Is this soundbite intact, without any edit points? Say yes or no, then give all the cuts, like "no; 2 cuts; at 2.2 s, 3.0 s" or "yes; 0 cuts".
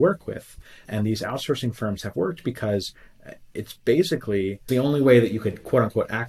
no; 2 cuts; at 0.9 s, 4.7 s